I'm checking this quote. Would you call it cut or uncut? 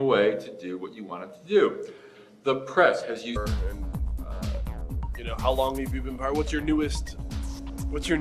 uncut